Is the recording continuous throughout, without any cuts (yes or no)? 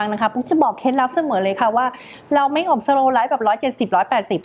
yes